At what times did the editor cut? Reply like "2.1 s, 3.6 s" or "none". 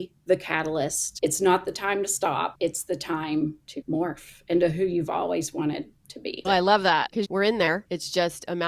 1.0 s, 2.5 s, 3.7 s, 6.4 s, 7.2 s, 7.8 s